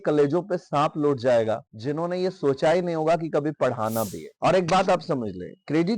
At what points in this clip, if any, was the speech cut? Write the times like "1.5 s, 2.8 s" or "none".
4.3 s

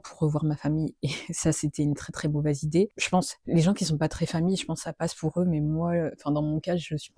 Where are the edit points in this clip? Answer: none

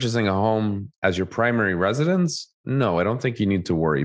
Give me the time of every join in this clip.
none

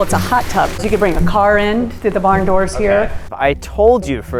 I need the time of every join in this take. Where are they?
0.8 s, 3.2 s

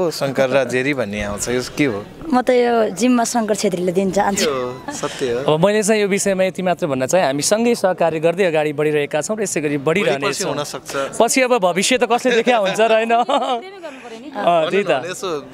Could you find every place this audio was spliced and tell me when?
none

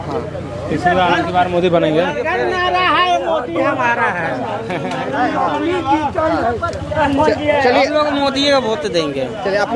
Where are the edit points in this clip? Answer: none

